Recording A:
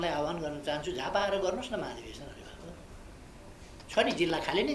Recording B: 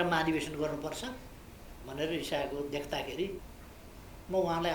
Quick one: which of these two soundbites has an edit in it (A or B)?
B